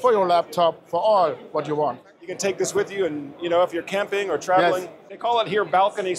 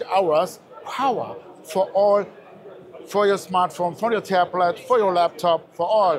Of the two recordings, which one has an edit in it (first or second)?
first